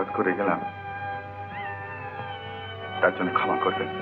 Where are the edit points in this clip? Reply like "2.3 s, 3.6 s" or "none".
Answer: none